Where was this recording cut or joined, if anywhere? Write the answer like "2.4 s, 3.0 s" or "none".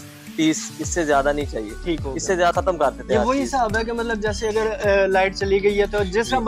2.5 s